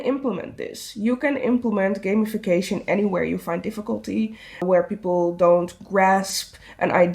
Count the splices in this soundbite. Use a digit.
1